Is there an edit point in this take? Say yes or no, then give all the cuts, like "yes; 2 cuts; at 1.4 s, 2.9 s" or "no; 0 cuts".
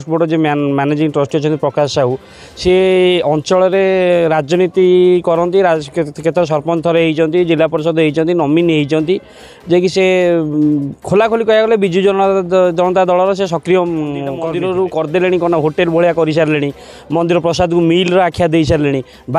yes; 1 cut; at 14.4 s